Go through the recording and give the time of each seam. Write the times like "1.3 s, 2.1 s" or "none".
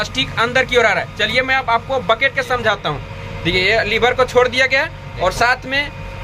none